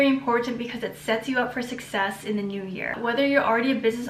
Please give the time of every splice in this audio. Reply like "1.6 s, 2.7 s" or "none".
2.9 s